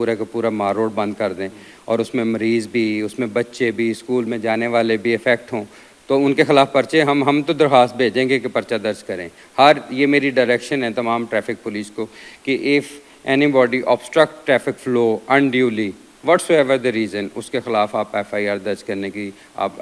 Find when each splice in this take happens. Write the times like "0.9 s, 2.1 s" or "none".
none